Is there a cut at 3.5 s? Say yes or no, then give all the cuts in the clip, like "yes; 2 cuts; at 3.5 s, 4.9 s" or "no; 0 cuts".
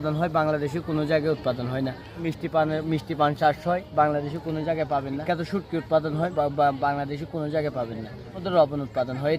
no; 4 cuts; at 2.2 s, 5.2 s, 6.3 s, 8.4 s